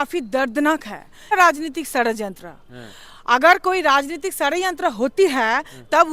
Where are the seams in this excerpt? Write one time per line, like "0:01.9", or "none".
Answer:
0:01.3

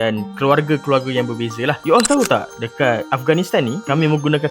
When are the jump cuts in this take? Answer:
0:01.8

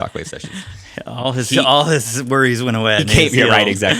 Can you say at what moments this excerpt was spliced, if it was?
0:03.0

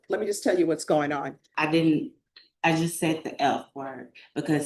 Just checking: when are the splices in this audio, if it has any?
0:01.4

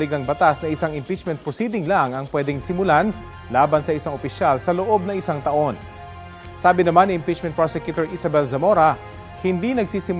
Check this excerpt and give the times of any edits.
0:02.0

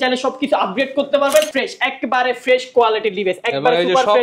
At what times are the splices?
0:01.6

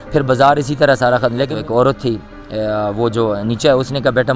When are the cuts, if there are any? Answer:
0:01.6

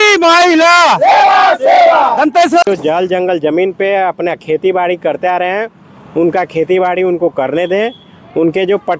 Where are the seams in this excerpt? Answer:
0:02.7

